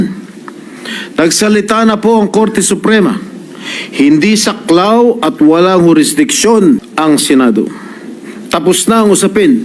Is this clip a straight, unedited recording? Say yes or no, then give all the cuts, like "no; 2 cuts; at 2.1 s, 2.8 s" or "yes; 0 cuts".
no; 1 cut; at 6.9 s